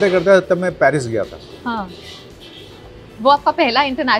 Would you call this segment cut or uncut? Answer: uncut